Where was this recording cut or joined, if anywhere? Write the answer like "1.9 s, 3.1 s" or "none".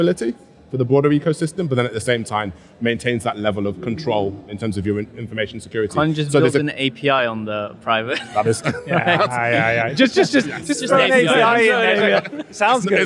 none